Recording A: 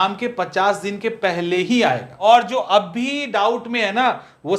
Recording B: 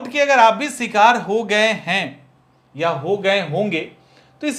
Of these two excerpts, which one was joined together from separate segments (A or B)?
A